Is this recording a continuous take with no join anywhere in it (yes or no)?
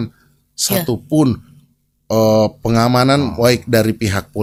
yes